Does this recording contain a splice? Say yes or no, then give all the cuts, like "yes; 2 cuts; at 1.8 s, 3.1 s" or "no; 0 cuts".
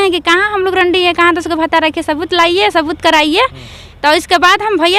no; 0 cuts